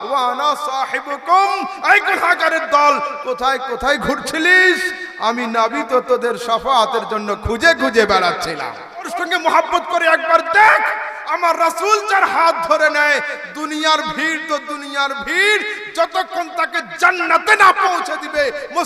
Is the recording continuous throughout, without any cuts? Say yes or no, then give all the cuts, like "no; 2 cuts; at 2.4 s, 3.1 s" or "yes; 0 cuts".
no; 1 cut; at 9.1 s